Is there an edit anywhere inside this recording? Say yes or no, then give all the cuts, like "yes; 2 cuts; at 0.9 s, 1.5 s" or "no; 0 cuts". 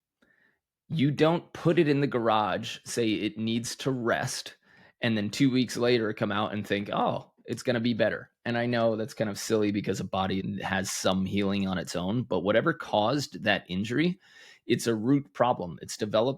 yes; 1 cut; at 10.4 s